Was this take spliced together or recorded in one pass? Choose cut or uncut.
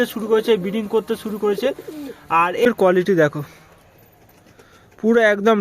cut